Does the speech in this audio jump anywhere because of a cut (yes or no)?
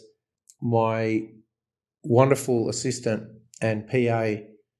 no